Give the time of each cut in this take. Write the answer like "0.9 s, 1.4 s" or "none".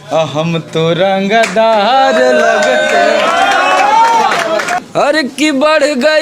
4.7 s